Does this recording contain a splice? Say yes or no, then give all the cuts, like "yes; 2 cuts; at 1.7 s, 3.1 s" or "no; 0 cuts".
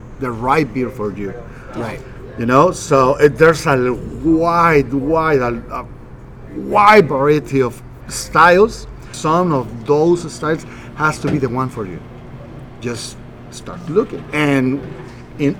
yes; 1 cut; at 9.1 s